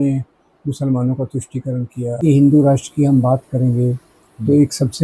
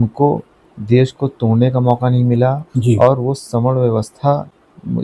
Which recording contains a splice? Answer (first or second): first